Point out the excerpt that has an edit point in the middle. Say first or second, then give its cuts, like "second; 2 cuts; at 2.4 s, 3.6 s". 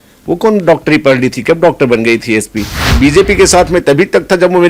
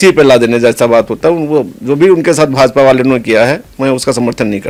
first; 1 cut; at 2.8 s